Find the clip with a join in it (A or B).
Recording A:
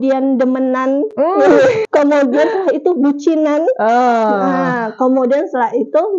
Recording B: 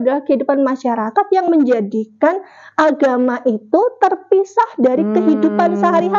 A